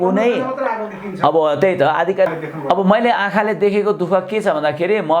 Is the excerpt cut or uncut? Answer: cut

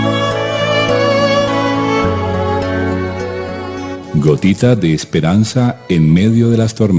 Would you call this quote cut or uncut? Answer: uncut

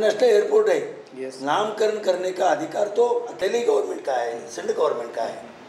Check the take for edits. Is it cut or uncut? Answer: cut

